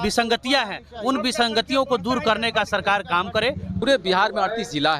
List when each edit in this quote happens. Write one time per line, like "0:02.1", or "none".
0:03.8